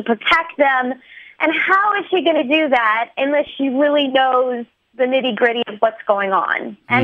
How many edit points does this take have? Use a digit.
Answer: 0